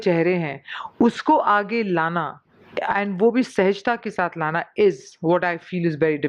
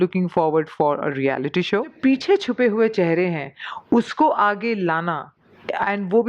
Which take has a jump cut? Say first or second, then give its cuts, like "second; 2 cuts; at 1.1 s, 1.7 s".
second; 1 cut; at 2.0 s